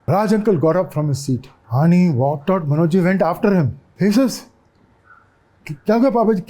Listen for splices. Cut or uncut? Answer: cut